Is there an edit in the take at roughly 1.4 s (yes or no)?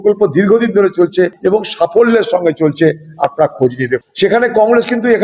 yes